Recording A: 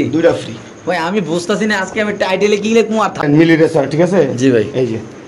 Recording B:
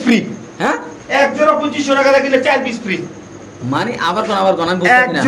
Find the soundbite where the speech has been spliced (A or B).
A